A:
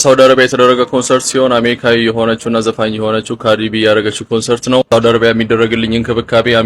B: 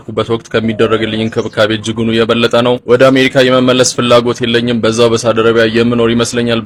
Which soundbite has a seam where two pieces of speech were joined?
A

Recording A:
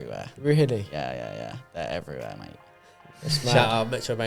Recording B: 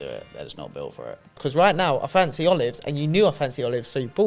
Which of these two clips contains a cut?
B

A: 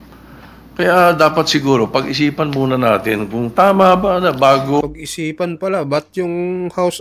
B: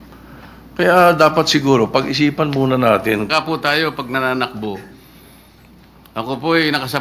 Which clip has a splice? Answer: B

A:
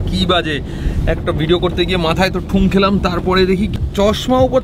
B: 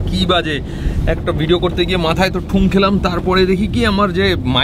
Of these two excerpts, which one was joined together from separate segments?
A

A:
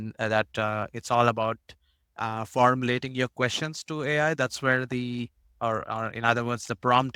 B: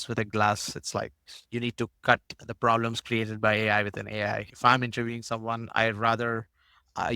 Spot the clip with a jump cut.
B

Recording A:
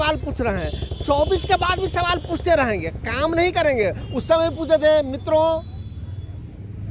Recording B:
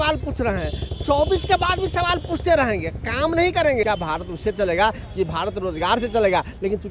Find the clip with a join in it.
B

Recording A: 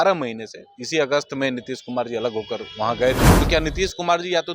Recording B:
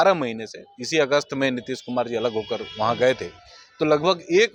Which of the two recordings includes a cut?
A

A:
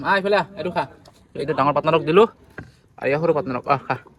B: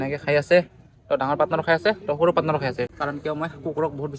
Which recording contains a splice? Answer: B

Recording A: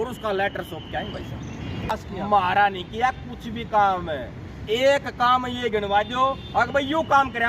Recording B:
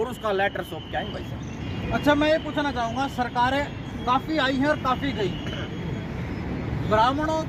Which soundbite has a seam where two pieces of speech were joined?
A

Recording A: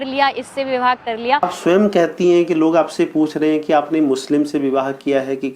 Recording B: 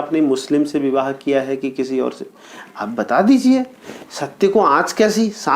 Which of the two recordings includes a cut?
A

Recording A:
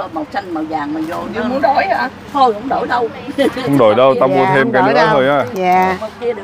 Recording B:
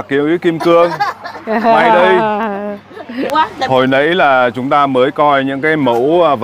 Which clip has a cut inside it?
B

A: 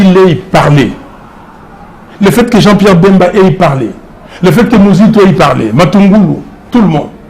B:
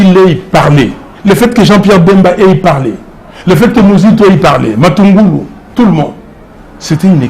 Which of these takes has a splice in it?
B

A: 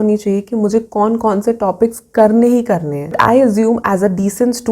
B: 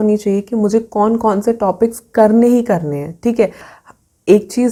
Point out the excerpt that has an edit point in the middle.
A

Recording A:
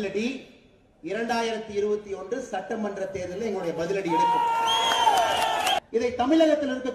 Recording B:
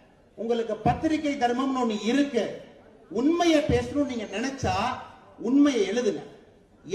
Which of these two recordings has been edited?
A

